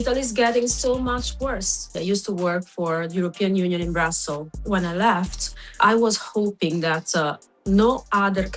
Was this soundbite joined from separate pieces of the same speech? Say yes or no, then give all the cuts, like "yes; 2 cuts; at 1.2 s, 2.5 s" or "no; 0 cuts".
yes; 3 cuts; at 1.9 s, 4.6 s, 5.7 s